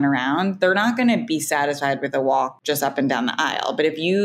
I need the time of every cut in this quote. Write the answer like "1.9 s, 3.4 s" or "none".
2.6 s

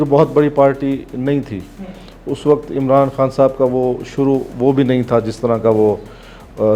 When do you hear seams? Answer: none

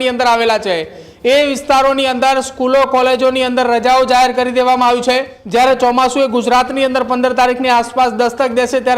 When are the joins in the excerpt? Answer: 5.3 s

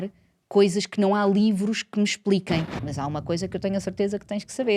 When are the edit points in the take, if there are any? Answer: 2.9 s

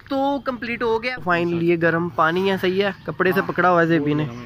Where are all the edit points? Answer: 0.9 s

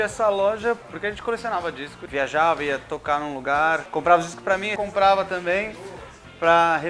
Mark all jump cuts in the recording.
0.9 s, 2.0 s, 3.8 s, 4.7 s

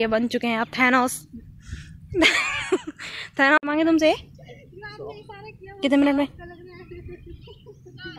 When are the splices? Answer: 3.6 s

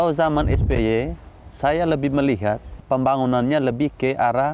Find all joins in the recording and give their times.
2.8 s

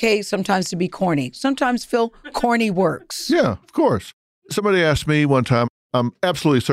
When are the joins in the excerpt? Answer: none

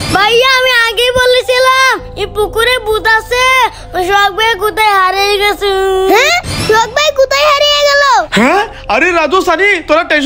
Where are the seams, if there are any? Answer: none

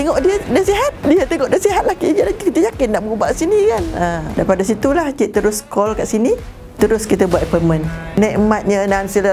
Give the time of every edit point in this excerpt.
1.0 s, 6.6 s, 8.1 s

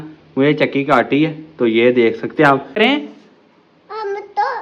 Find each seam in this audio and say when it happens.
2.7 s

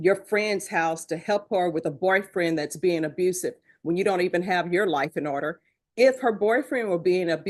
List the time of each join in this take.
none

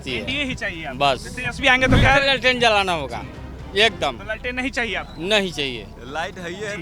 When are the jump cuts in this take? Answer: 2.0 s

